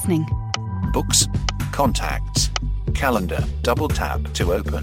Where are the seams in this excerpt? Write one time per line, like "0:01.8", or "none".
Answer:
none